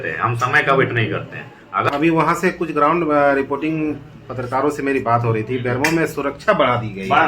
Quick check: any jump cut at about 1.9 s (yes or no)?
yes